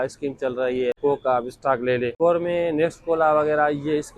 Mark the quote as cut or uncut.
cut